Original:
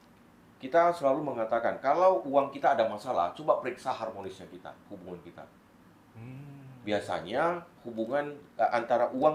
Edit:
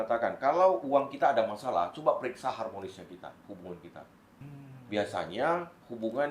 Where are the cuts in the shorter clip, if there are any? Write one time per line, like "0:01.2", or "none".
0:04.4

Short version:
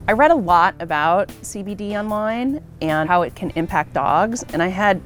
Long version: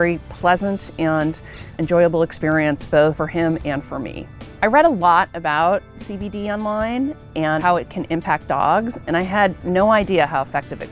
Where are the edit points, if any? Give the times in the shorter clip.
none

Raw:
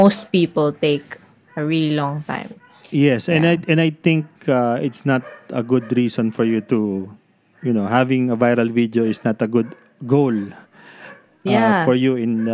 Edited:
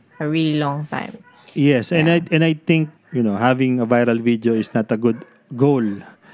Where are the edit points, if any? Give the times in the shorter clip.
0:03.0

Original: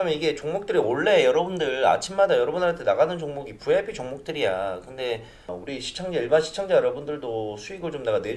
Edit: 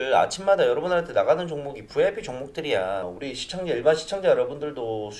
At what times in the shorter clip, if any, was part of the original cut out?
0:03.1

